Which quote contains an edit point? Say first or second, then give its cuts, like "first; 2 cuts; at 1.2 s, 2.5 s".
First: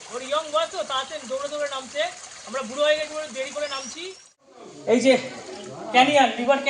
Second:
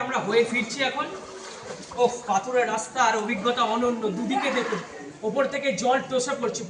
first; 1 cut; at 4.7 s